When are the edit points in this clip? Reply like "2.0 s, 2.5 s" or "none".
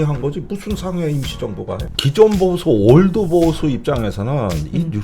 1.9 s